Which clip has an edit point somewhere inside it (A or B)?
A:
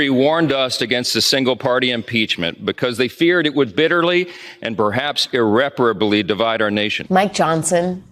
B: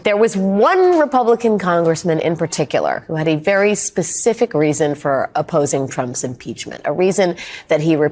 A